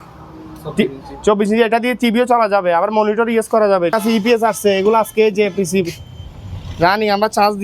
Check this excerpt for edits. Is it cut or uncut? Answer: cut